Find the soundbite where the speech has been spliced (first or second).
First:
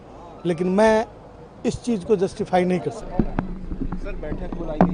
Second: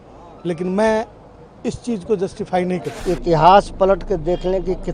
second